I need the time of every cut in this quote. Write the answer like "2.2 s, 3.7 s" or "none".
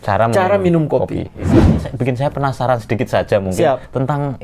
1.8 s

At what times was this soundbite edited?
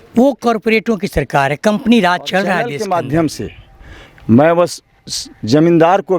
2.7 s

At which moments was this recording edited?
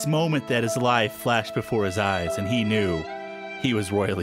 none

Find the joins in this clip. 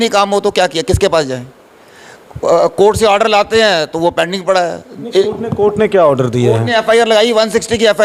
none

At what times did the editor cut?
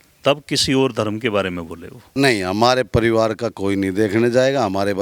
2.0 s

